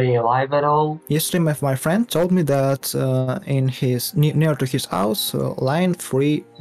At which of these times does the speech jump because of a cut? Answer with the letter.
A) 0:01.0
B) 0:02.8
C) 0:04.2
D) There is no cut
A